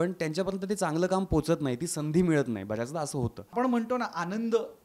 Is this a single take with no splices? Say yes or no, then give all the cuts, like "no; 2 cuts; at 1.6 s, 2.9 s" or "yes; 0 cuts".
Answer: no; 1 cut; at 3.5 s